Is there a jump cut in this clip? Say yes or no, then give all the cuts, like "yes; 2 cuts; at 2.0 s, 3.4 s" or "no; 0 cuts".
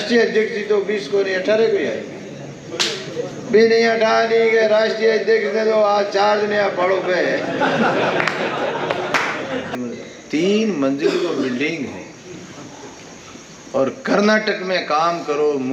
yes; 1 cut; at 9.8 s